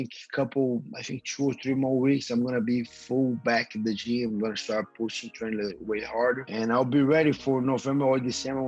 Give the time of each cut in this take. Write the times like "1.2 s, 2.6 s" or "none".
6.4 s